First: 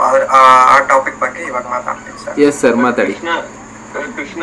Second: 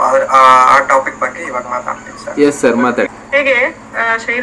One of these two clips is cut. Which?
second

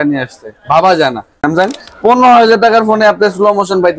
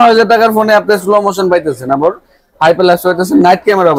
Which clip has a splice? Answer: first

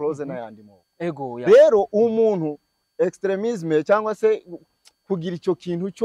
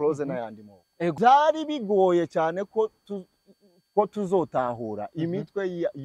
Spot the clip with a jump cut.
second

